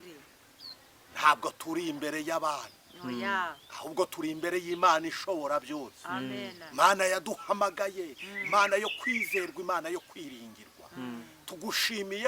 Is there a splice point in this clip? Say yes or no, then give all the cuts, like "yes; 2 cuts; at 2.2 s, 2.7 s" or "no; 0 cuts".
no; 0 cuts